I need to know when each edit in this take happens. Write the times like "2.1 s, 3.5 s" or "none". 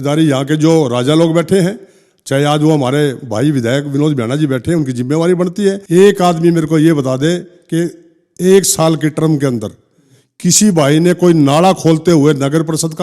5.8 s